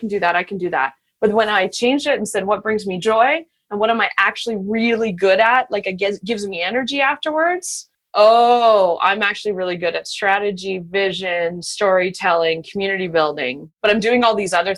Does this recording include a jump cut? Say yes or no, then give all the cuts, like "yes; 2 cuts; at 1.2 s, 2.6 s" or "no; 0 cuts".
yes; 2 cuts; at 8.0 s, 13.7 s